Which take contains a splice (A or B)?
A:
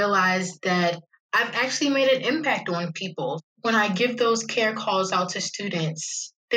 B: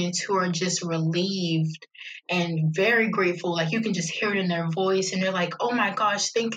A